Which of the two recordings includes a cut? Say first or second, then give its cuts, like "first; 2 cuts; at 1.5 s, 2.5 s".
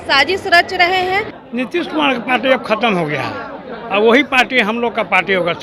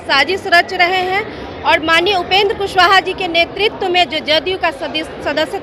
first; 1 cut; at 1.4 s